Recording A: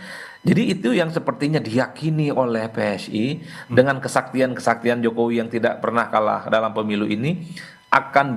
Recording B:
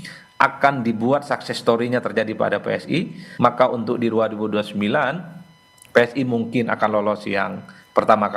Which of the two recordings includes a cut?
B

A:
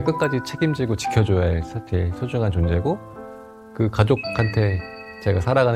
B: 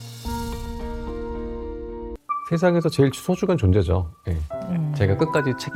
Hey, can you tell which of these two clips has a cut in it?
B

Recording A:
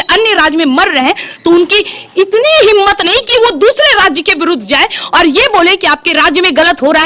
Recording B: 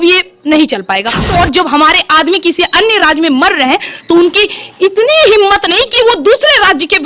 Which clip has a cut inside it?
B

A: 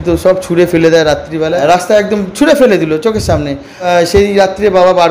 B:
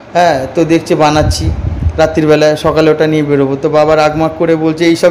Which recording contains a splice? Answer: A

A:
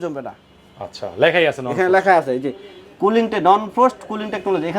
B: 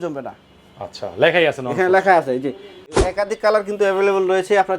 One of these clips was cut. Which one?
B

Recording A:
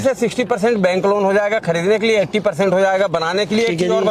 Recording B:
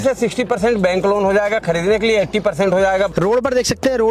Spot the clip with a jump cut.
B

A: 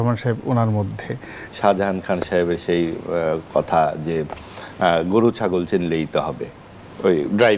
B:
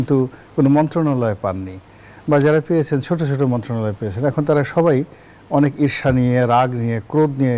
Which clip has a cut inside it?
A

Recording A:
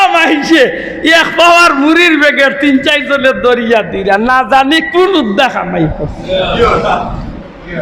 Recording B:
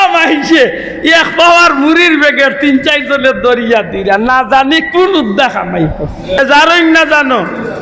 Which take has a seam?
B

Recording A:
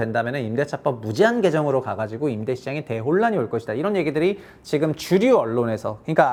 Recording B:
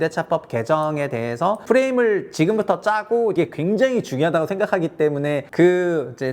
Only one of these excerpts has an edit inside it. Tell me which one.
B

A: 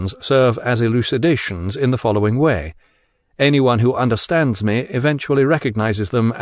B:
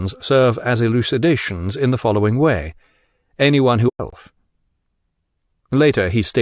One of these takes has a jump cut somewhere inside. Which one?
A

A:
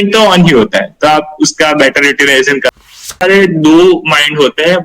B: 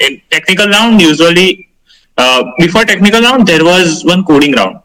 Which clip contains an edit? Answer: A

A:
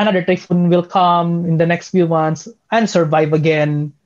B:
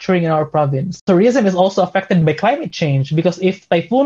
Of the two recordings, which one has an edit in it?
B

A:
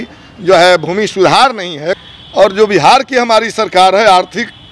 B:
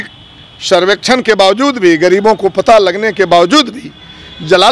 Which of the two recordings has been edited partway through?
A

